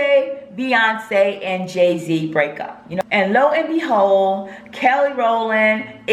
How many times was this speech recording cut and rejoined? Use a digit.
1